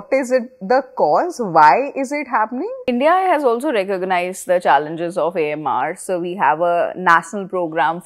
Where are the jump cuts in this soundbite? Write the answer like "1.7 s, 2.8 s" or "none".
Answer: 2.7 s